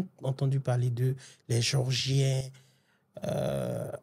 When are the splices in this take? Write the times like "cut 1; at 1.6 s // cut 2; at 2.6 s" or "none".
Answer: none